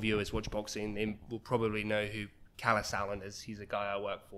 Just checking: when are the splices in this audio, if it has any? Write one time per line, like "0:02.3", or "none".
none